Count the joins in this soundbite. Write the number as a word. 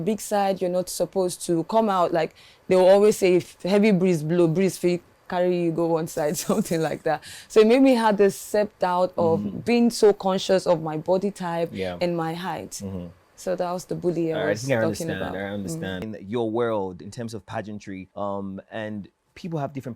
one